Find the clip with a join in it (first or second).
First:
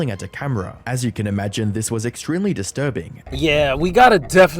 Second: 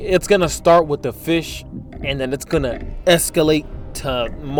first